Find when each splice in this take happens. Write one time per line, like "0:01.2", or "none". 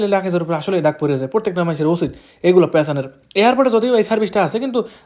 none